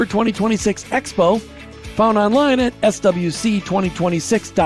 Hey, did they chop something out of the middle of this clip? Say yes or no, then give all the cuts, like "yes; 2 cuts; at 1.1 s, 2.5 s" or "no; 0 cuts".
no; 0 cuts